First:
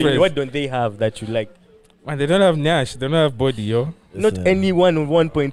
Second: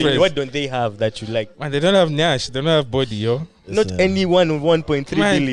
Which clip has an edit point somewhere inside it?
second; 1 cut; at 1.6 s

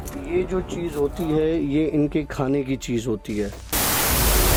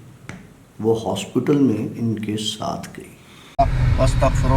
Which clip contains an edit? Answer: second; 1 cut; at 3.5 s

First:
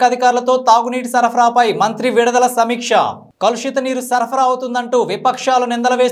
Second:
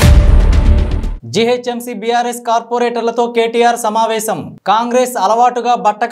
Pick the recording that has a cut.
second; 1 cut; at 1.0 s

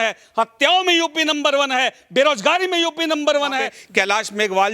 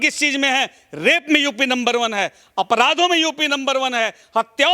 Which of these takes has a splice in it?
first; 1 cut; at 3.8 s

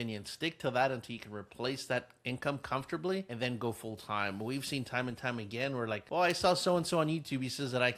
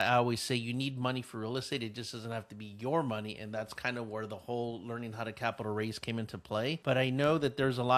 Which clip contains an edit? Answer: first; 2 cuts; at 3.3 s, 6.0 s

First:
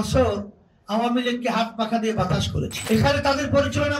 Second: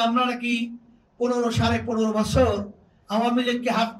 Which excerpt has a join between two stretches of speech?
first; 1 cut; at 2.8 s

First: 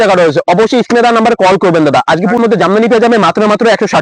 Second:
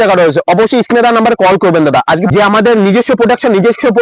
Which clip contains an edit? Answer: second; 1 cut; at 2.3 s

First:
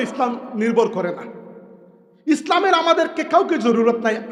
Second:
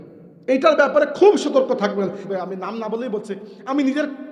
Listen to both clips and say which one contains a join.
second; 1 cut; at 2.2 s

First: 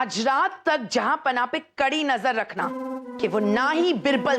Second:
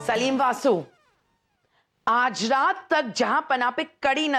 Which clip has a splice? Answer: first; 1 cut; at 3.1 s

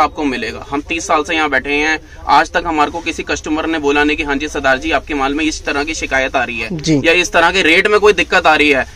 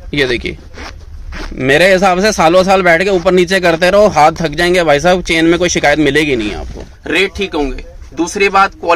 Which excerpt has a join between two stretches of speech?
second; 1 cut; at 6.9 s

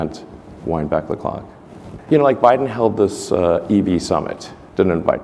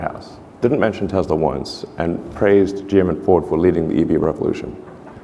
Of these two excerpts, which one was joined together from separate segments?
second; 1 cut; at 4.2 s

